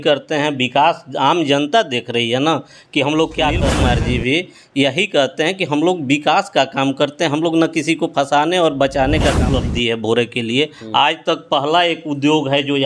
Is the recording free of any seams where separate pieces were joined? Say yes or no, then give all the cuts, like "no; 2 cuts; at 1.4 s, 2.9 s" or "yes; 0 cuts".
no; 2 cuts; at 3.7 s, 9.6 s